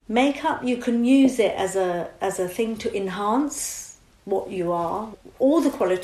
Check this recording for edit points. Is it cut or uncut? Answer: cut